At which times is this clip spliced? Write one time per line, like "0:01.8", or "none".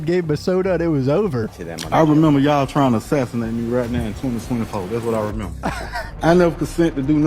0:01.5
0:06.1